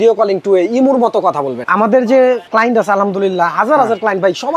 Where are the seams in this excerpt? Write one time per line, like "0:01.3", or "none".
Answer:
0:01.6
0:02.5

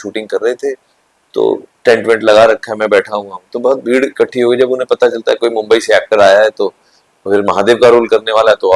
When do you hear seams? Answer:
none

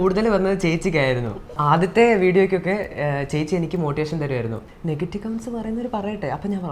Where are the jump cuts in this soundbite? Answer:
0:01.6
0:04.7

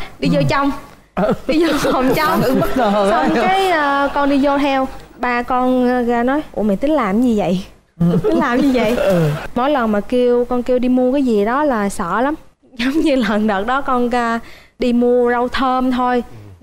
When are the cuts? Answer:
0:09.4
0:14.7

